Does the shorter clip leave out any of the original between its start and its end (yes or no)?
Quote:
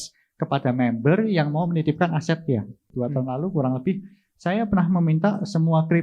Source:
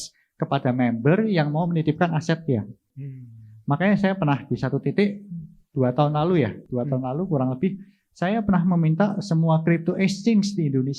yes